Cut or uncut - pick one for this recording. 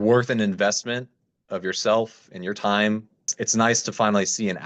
cut